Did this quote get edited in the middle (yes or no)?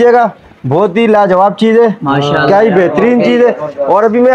no